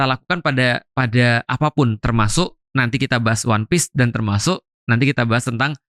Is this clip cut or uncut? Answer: uncut